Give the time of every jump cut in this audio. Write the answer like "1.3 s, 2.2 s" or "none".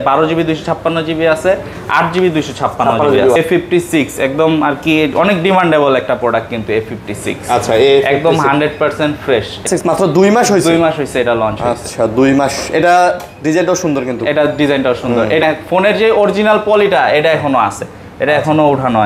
3.4 s, 9.7 s, 15.4 s